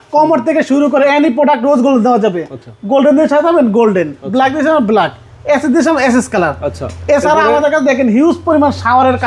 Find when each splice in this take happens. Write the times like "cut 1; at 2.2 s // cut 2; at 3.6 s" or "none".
none